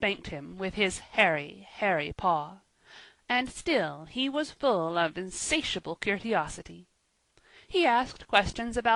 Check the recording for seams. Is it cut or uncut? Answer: uncut